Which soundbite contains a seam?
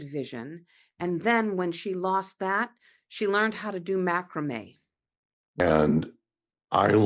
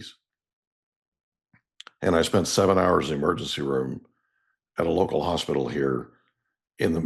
first; 1 cut; at 5.6 s

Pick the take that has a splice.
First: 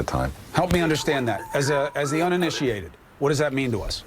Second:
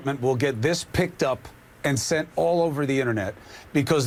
first; 1 cut; at 1.5 s

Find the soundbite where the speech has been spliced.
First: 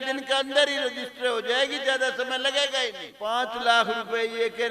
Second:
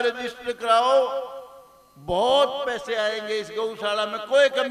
first; 1 cut; at 3.1 s

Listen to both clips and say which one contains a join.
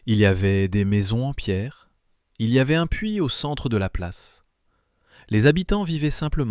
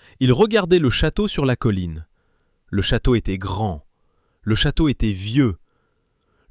first; 1 cut; at 4.5 s

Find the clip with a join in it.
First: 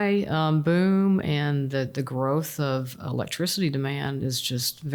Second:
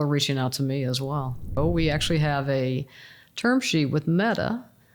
second; 1 cut; at 1.5 s

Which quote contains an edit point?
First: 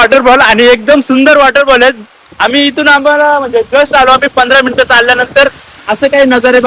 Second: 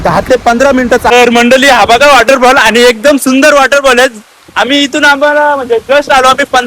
second; 1 cut; at 1.1 s

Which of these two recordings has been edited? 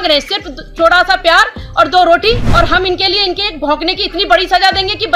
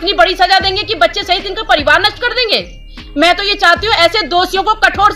first; 1 cut; at 2.5 s

